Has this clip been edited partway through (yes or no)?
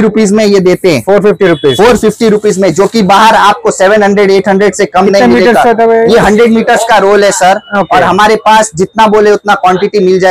no